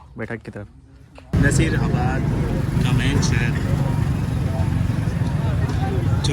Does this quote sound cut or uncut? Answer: cut